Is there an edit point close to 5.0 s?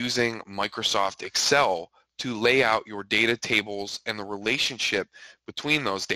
no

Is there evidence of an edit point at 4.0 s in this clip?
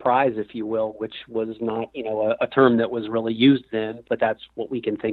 yes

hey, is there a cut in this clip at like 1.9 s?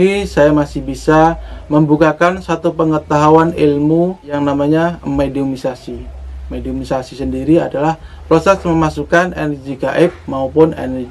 no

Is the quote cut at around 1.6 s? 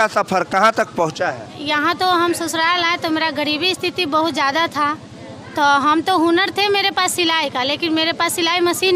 yes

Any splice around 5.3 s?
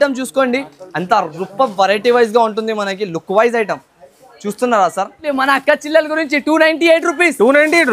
yes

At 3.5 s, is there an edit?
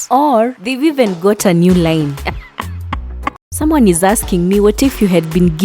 yes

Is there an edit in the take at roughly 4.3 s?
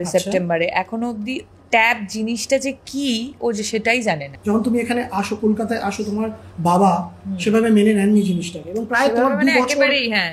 yes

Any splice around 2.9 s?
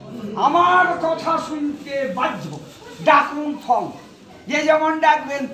no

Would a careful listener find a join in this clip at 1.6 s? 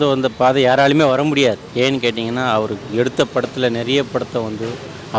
yes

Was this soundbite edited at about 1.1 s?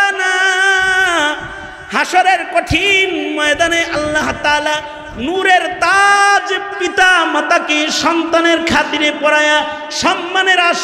no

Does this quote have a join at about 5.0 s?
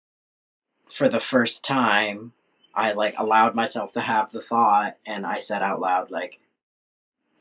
no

